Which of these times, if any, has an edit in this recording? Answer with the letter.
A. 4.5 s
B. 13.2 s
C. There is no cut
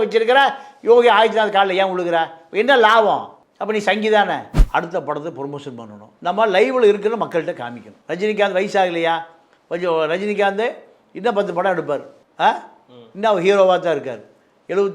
A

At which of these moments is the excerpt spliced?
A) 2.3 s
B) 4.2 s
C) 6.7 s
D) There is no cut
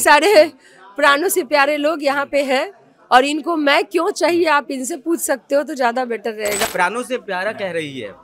C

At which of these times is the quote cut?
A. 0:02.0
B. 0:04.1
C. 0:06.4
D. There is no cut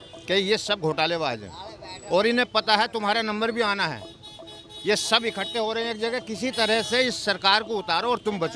D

